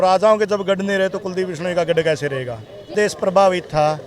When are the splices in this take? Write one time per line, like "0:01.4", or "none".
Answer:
0:02.9